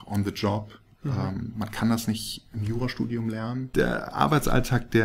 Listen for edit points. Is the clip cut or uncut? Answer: cut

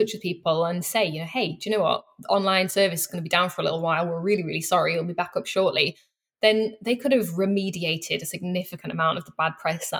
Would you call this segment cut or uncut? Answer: uncut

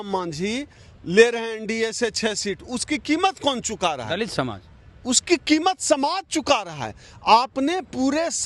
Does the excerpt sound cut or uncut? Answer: uncut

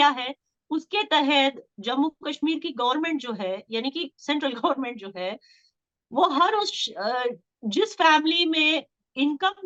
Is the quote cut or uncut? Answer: uncut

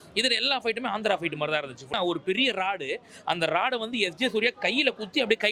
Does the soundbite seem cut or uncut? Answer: cut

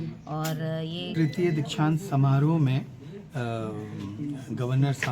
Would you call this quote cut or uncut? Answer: cut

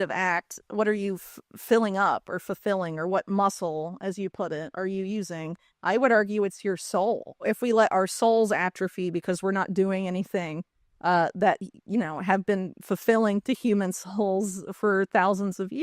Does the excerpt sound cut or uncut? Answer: cut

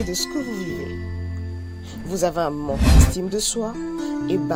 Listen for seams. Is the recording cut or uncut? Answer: uncut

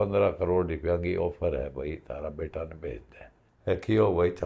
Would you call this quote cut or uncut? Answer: cut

